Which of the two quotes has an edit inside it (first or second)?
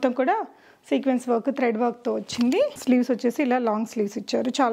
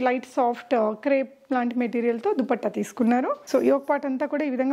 second